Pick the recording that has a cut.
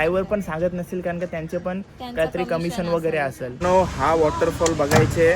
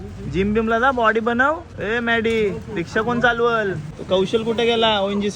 first; 1 cut; at 3.5 s

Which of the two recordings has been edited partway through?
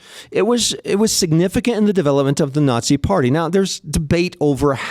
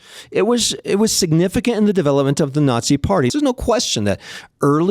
second; 1 cut; at 3.3 s

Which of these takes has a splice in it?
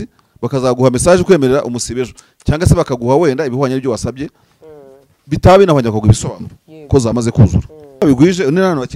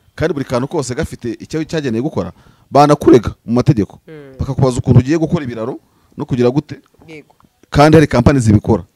first; 1 cut; at 8.0 s

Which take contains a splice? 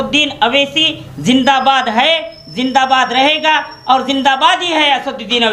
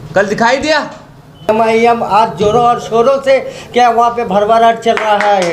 second; 1 cut; at 1.5 s

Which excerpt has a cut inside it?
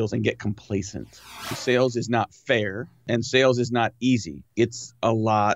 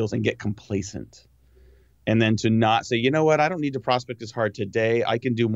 first; 3 cuts; at 1.5 s, 3.0 s, 4.4 s

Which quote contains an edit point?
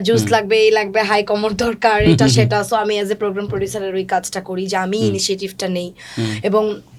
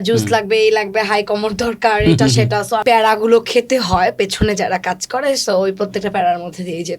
second; 1 cut; at 2.8 s

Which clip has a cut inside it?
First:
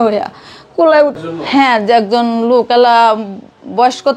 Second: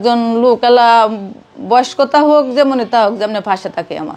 first; 1 cut; at 1.2 s

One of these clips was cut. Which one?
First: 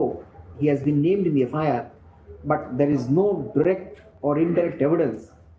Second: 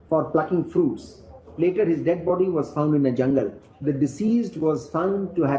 second; 2 cuts; at 1.5 s, 3.7 s

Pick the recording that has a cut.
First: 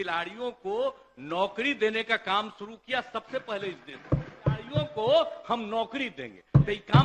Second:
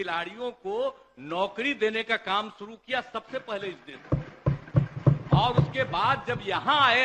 first; 1 cut; at 4.7 s

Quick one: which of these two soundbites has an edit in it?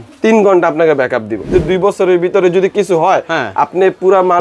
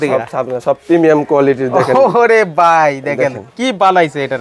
first; 1 cut; at 1.5 s

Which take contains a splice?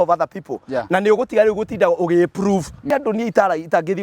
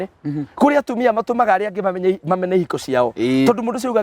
first; 1 cut; at 2.9 s

